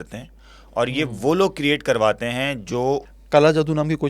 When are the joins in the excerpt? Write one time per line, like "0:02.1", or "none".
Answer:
0:03.1